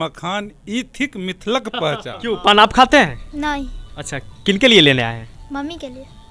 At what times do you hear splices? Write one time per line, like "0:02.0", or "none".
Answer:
0:02.1